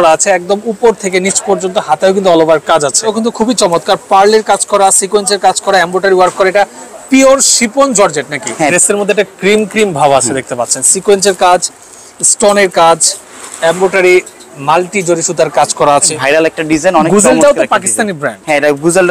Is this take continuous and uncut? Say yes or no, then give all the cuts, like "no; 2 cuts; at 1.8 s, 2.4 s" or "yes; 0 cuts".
no; 3 cuts; at 3.1 s, 8.7 s, 16.1 s